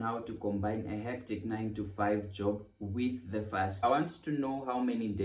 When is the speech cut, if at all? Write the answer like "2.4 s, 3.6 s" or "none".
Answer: 3.8 s

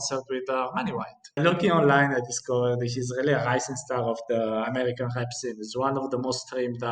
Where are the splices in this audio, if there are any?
1.4 s

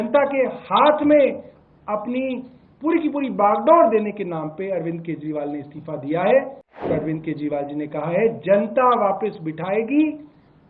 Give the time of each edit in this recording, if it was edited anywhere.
6.9 s

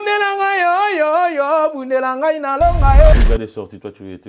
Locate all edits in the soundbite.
3.1 s

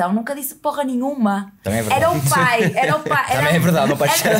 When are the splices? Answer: none

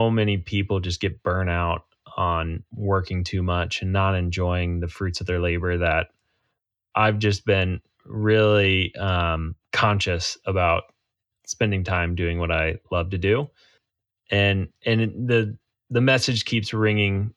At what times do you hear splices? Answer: none

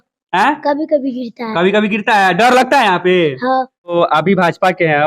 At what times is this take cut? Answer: 3.8 s

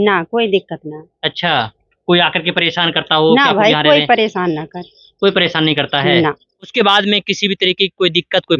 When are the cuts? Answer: 6.7 s

